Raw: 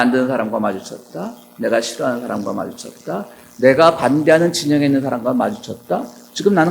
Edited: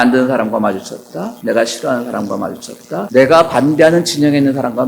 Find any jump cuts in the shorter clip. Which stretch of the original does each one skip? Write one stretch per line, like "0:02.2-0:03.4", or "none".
0:01.3-0:01.5
0:03.2-0:03.5